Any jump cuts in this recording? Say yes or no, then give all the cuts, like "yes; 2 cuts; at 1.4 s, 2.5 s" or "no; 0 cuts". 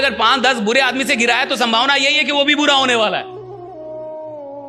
no; 0 cuts